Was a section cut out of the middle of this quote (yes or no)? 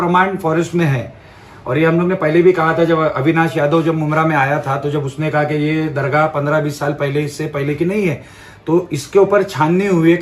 no